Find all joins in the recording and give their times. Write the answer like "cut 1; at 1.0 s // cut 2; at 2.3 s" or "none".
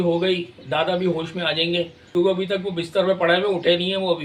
cut 1; at 2.1 s